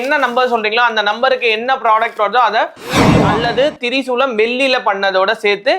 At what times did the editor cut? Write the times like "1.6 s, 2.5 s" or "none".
3.2 s